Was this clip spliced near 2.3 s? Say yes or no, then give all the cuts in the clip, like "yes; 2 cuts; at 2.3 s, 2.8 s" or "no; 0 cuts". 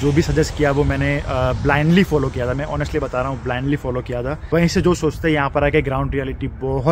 no; 1 cut; at 4.3 s